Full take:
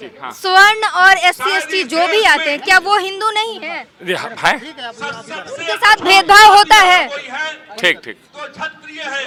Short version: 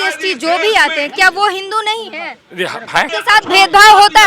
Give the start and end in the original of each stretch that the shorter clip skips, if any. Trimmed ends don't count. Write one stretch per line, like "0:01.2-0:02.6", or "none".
0:04.6-0:05.6